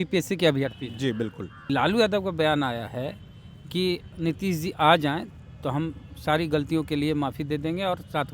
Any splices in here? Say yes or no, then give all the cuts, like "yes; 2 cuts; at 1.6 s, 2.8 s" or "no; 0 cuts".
yes; 1 cut; at 1.6 s